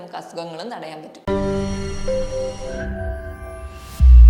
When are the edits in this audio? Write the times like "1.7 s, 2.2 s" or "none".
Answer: 1.1 s